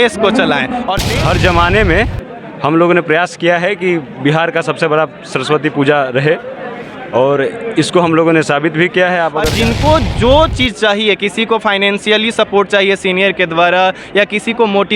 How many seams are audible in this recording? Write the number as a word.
two